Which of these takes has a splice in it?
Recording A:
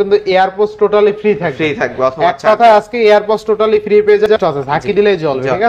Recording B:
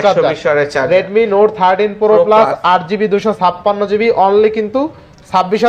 A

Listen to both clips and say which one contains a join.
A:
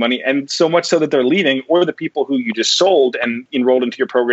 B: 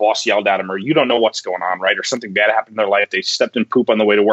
A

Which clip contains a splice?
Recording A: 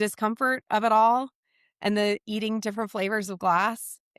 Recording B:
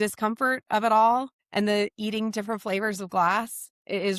B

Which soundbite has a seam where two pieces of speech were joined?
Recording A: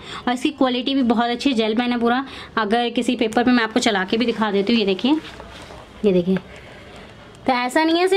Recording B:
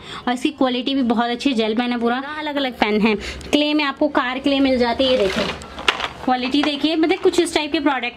B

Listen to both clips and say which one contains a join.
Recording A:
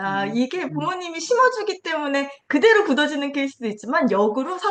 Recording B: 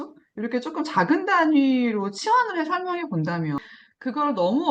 B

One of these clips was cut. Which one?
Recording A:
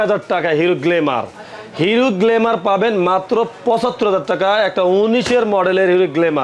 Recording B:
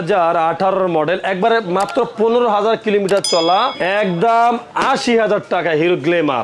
B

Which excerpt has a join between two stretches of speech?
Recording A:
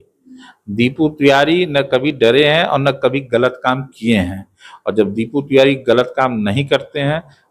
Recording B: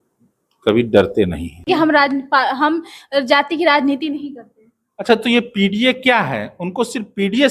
B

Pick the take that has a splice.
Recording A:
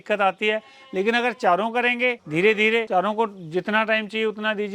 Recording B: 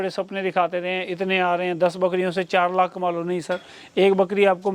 A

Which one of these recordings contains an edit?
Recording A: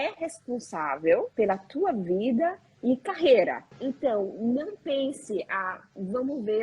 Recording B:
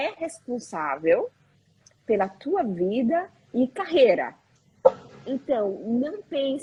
A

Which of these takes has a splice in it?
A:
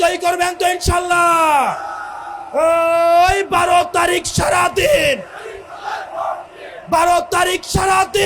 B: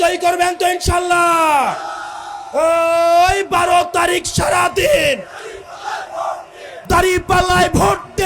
B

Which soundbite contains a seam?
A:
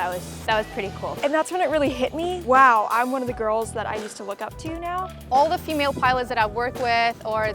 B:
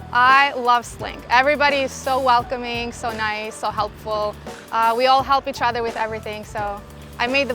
A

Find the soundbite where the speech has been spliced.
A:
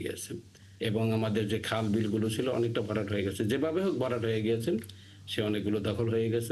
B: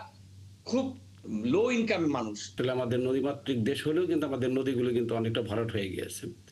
B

